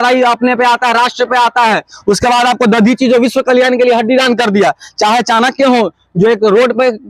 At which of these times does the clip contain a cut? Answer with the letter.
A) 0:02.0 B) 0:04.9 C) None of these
C